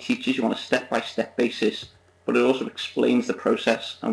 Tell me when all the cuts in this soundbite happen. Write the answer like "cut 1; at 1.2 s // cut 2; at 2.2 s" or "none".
none

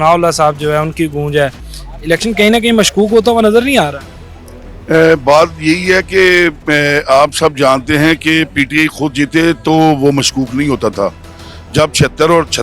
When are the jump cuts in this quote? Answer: none

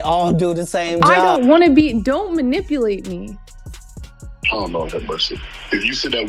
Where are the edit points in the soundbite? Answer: cut 1; at 1.2 s

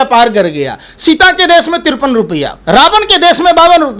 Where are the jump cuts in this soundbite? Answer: cut 1; at 2.6 s

